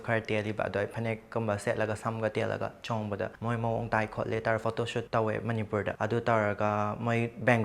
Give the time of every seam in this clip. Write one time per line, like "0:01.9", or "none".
0:03.4
0:05.1
0:06.0